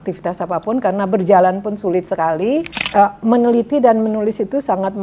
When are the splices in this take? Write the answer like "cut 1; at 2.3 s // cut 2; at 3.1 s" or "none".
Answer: cut 1; at 2.8 s